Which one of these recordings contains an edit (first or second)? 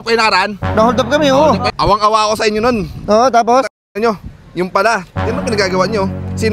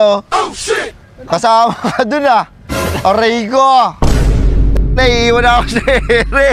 first